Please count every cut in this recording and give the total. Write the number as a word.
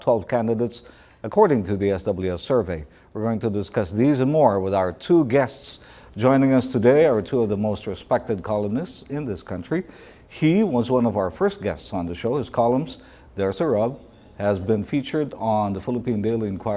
one